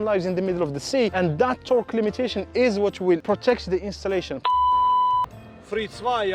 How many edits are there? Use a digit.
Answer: 3